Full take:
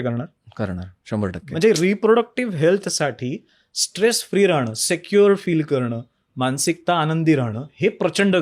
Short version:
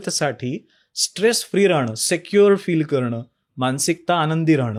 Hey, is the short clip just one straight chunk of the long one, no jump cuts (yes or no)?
yes